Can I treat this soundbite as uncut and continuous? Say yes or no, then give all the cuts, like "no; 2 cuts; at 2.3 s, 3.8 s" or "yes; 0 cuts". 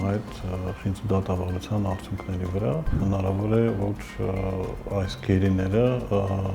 no; 1 cut; at 2.9 s